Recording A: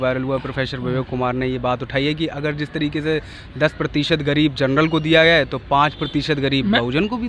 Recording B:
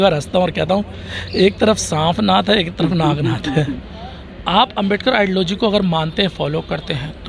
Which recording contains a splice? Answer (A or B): B